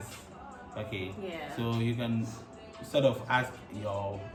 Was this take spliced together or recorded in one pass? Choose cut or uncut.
uncut